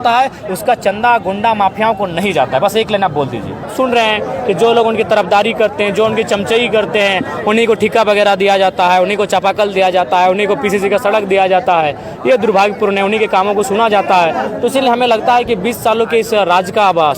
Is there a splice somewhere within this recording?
yes; 1 cut; at 3.6 s

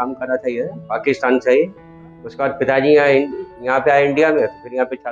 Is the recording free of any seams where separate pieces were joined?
yes; 0 cuts

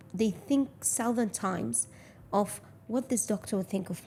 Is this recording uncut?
yes; 0 cuts

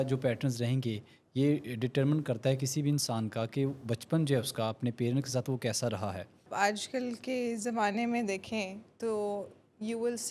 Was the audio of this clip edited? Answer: yes; 1 cut; at 6.5 s

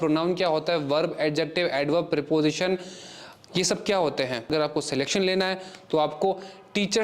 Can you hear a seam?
yes; 1 cut; at 4.5 s

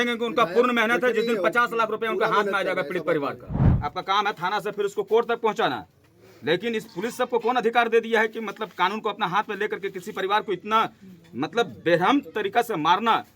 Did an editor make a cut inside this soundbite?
yes; 1 cut; at 3.7 s

